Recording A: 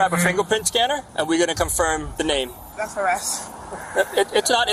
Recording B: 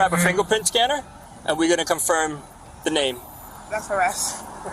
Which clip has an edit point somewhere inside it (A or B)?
A